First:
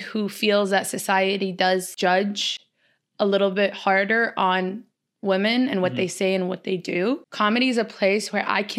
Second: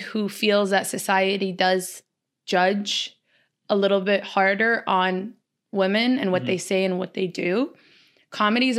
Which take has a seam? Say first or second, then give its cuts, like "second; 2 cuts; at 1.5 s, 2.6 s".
first; 2 cuts; at 1.9 s, 7.3 s